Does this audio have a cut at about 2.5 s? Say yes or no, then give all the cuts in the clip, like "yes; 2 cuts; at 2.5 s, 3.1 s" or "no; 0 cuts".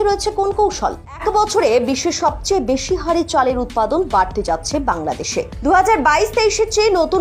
no; 1 cut; at 1.2 s